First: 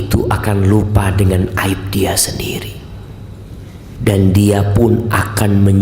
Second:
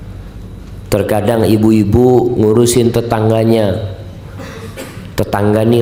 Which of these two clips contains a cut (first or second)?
first